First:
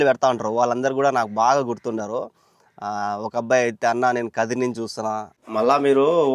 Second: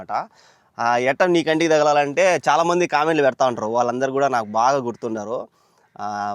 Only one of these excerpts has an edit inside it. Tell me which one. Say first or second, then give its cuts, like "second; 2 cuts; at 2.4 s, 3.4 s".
first; 1 cut; at 5.4 s